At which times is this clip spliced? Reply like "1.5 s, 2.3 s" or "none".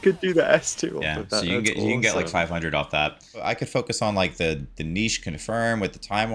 3.4 s

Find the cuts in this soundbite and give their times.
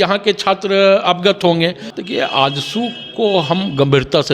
1.9 s

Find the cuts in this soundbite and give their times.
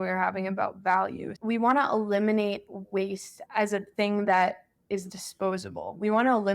1.3 s

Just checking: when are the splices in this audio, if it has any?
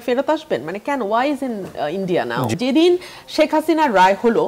2.5 s

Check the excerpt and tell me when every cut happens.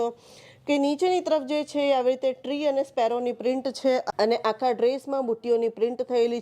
4.1 s

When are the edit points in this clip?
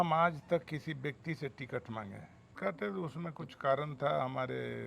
2.5 s

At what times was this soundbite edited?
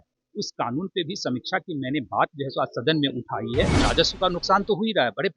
3.8 s

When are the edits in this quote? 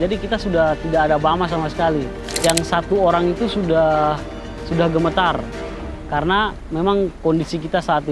2.3 s

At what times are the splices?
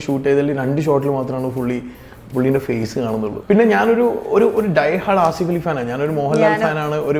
3.3 s

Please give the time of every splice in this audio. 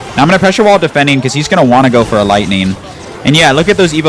none

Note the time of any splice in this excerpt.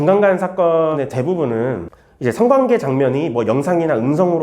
0.9 s

